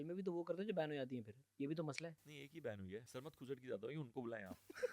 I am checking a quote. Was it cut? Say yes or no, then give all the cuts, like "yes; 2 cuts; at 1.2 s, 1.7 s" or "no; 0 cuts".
yes; 1 cut; at 3.2 s